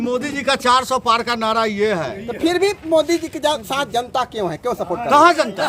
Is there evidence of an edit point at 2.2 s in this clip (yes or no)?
no